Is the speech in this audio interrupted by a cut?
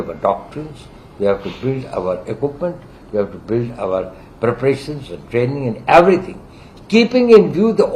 no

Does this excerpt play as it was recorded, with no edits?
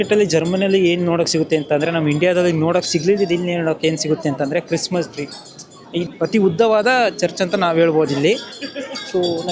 no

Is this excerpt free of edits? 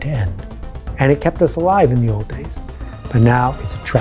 yes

